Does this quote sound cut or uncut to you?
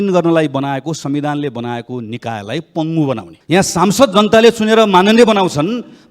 cut